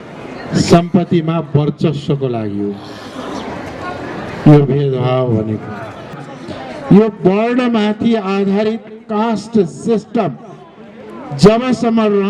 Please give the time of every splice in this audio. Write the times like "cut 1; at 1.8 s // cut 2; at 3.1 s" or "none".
cut 1; at 6.3 s